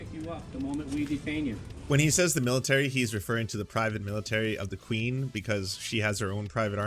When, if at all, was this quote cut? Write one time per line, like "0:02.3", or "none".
0:01.7